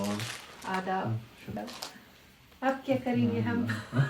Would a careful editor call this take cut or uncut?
cut